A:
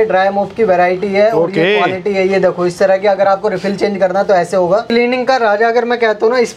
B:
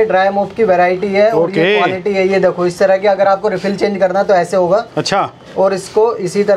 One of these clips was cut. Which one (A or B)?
A